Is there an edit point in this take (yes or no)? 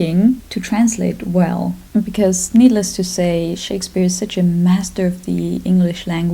yes